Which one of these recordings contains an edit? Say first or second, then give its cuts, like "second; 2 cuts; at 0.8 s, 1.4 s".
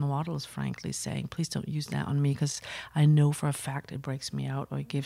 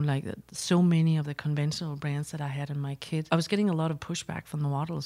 second; 1 cut; at 3.3 s